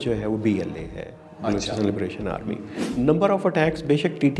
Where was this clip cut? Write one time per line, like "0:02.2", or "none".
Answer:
0:02.8